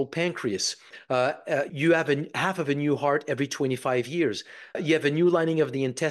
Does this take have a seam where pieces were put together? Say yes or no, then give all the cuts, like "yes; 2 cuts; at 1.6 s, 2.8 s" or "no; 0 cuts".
yes; 2 cuts; at 1.7 s, 4.8 s